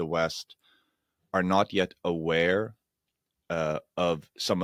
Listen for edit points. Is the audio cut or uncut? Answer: uncut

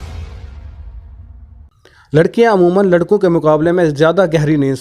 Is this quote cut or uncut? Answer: cut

